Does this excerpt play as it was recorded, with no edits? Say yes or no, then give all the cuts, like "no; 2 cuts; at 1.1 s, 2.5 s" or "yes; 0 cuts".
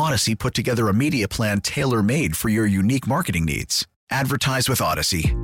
yes; 0 cuts